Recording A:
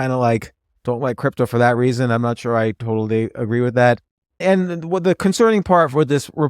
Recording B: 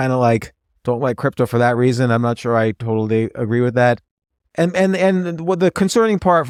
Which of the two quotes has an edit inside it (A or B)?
A